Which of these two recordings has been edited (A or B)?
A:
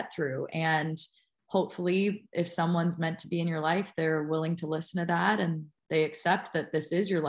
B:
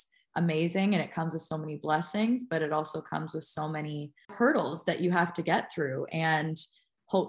B